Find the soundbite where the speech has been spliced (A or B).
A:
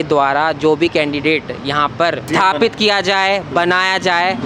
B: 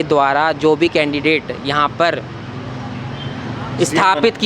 A